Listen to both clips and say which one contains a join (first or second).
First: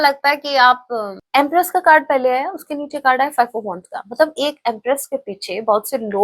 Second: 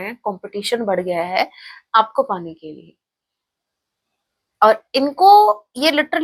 first